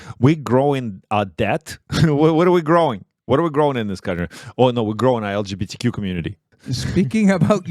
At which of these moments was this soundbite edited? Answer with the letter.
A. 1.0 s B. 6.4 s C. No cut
B